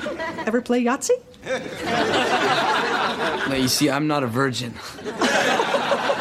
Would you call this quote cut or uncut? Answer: cut